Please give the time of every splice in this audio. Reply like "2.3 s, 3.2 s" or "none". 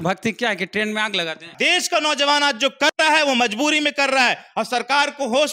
1.5 s